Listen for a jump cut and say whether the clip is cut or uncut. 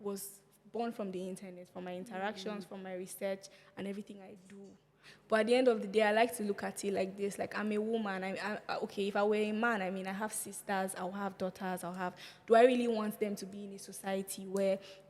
cut